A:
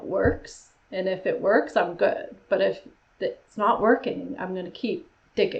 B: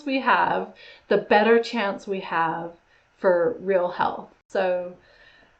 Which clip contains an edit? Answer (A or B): B